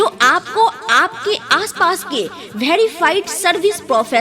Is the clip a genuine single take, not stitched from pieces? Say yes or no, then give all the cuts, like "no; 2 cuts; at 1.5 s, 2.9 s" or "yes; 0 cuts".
yes; 0 cuts